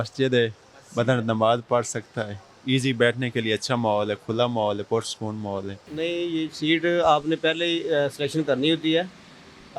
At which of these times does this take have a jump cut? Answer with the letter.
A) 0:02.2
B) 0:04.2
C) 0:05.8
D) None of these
C